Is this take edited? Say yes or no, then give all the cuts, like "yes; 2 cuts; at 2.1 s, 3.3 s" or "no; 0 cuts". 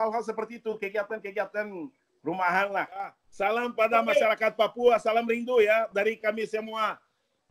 yes; 1 cut; at 3.3 s